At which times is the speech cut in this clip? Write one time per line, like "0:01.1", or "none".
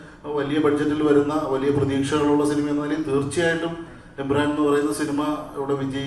none